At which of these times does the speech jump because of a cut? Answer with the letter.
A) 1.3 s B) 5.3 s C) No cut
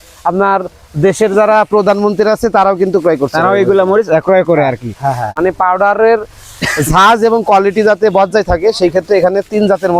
B